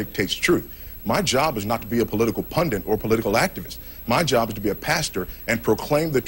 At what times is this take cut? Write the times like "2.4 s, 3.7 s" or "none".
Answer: none